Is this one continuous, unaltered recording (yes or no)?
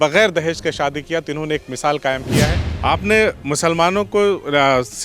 no